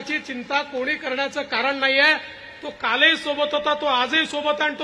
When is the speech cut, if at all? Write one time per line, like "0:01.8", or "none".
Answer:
none